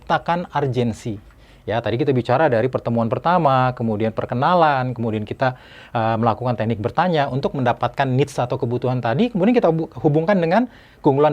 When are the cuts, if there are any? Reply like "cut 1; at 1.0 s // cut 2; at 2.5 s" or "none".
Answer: none